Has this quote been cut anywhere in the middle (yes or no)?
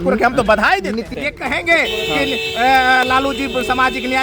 yes